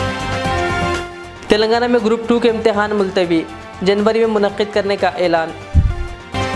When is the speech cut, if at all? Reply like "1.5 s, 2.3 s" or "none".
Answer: none